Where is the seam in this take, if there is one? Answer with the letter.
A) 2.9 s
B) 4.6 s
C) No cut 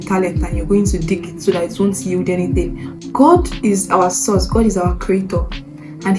A